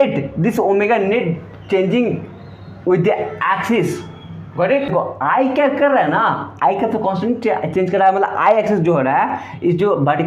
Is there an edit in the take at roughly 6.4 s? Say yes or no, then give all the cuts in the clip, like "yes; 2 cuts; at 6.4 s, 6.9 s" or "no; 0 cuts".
no; 1 cut; at 4.9 s